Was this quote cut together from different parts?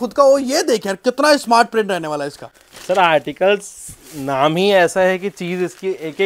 no; 0 cuts

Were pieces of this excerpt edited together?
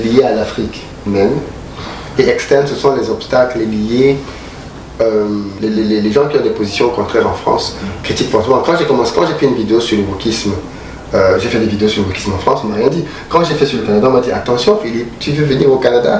yes; 1 cut; at 5.5 s

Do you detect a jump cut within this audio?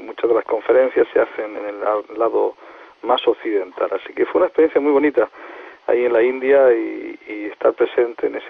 no; 0 cuts

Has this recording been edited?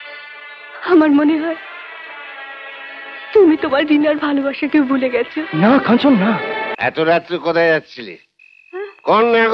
yes; 1 cut; at 6.7 s

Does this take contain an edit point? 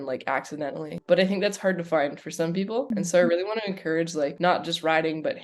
yes; 3 cuts; at 0.9 s, 2.9 s, 4.3 s

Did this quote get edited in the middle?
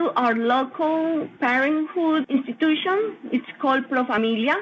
no; 0 cuts

